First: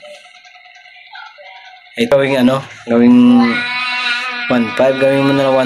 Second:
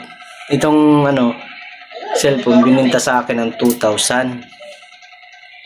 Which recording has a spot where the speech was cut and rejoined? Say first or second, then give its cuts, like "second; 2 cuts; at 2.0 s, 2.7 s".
first; 1 cut; at 2.1 s